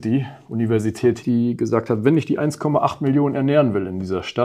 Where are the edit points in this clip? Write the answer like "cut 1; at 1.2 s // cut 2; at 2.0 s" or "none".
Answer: cut 1; at 1.2 s